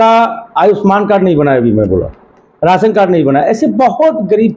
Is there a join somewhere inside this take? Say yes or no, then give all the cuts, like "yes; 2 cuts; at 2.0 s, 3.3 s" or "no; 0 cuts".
no; 0 cuts